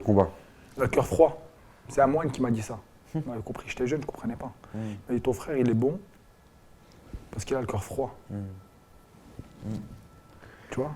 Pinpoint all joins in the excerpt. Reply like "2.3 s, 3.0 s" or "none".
none